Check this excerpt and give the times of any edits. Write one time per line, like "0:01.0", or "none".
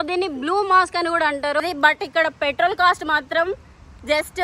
0:01.6